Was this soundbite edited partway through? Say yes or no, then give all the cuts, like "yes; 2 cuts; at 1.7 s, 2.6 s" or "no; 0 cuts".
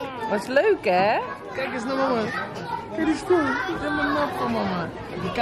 no; 0 cuts